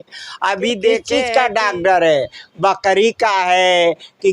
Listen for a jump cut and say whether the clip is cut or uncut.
cut